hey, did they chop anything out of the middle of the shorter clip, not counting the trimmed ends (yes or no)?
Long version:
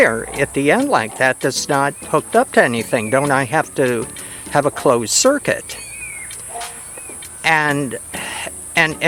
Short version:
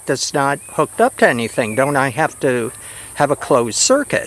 no